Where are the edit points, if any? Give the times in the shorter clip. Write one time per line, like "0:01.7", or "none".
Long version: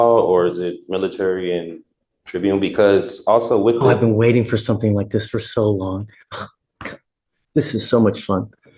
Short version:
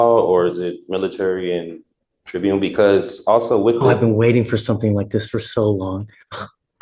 none